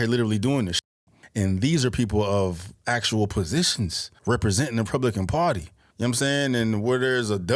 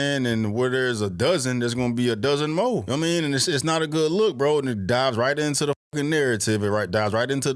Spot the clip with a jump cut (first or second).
second